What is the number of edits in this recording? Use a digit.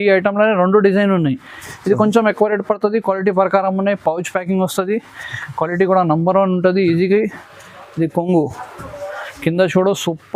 1